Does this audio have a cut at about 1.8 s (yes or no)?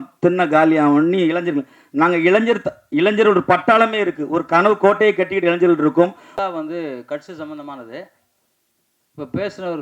no